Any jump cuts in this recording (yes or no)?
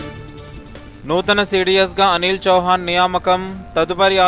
yes